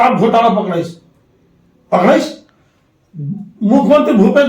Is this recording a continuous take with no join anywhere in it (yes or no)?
yes